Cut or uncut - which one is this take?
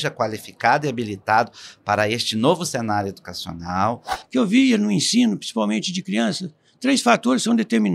cut